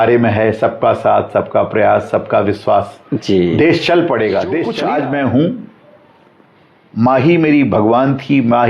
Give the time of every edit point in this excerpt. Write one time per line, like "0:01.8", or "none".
0:04.7